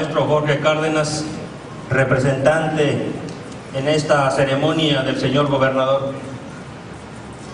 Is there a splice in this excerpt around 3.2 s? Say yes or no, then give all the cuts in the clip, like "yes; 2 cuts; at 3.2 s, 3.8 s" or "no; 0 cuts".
no; 1 cut; at 5.2 s